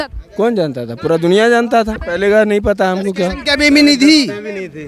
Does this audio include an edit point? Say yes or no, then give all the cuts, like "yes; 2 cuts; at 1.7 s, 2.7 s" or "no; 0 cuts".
yes; 1 cut; at 2.0 s